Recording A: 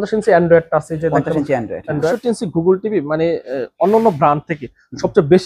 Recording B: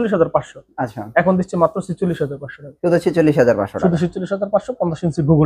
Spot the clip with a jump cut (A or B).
A